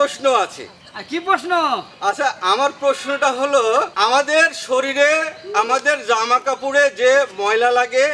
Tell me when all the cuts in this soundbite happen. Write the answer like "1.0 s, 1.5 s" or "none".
3.9 s